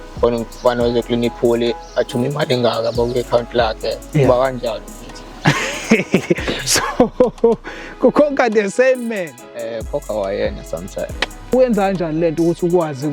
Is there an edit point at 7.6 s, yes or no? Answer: no